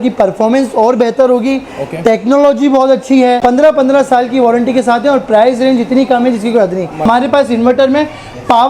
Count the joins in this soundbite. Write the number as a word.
two